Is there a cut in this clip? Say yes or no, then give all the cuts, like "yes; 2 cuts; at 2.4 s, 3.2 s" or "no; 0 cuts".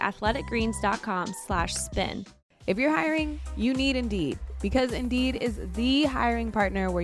yes; 1 cut; at 2.2 s